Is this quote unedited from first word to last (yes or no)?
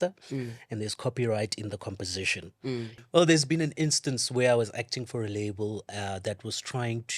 no